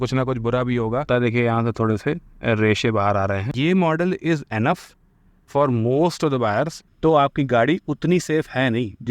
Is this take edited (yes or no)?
yes